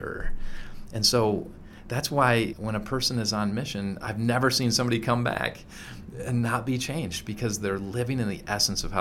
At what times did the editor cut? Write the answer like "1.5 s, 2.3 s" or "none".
2.5 s